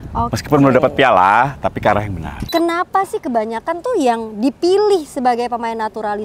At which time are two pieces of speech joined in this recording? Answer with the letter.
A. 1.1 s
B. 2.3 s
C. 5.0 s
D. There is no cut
B